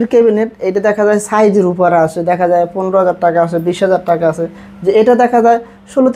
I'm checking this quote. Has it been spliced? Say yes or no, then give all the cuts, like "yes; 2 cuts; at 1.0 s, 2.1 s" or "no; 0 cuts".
no; 0 cuts